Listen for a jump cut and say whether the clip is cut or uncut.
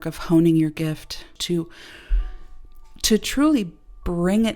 cut